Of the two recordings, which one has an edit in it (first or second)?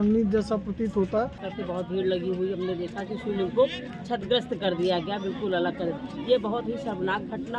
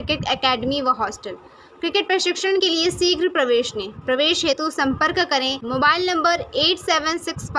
first